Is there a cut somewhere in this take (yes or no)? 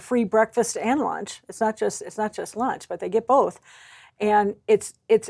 no